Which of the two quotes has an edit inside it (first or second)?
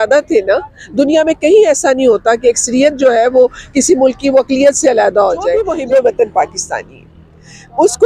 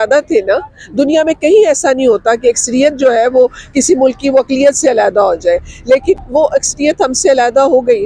first